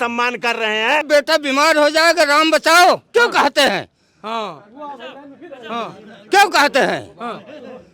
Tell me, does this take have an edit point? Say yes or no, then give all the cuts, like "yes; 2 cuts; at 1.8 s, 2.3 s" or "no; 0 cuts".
yes; 1 cut; at 1.1 s